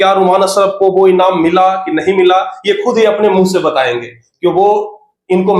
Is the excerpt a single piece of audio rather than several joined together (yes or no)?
yes